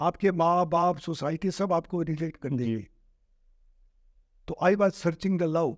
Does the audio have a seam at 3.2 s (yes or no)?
no